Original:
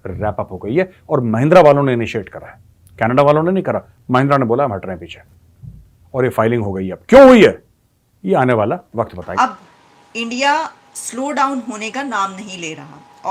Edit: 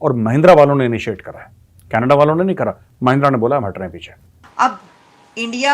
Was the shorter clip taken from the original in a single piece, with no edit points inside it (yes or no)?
no